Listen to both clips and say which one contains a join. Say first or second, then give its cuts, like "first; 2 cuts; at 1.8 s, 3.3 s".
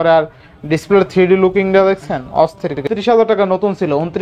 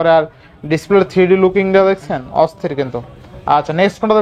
first; 1 cut; at 2.8 s